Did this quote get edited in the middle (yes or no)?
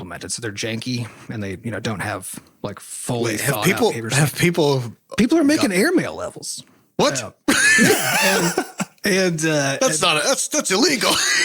no